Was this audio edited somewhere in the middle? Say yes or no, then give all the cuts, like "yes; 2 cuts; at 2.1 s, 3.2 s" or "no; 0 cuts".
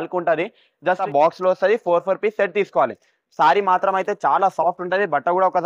yes; 1 cut; at 1.0 s